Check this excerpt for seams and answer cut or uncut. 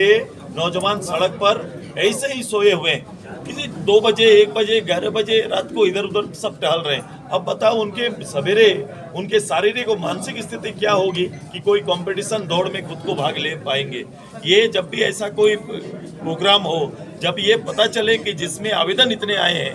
uncut